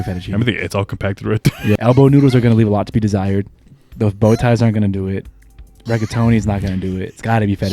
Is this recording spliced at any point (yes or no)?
yes